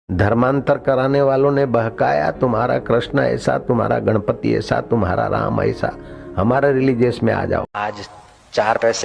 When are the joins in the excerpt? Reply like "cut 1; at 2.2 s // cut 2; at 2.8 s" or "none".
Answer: cut 1; at 7.7 s